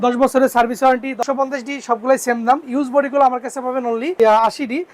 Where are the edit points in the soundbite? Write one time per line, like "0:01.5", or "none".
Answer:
0:01.2
0:04.1